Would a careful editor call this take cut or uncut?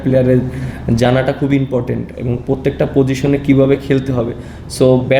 uncut